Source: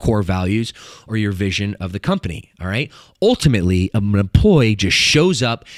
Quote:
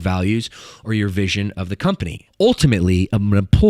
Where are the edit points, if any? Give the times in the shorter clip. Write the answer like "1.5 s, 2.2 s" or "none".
2.2 s